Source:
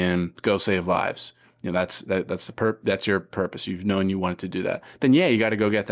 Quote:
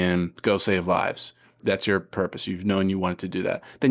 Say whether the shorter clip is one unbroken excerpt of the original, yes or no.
no